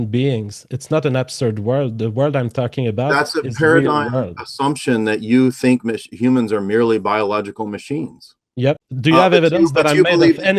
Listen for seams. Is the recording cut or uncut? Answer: cut